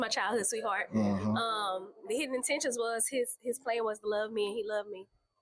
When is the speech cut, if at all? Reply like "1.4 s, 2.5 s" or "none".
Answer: none